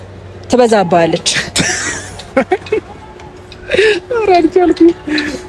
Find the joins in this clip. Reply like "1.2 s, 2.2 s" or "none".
none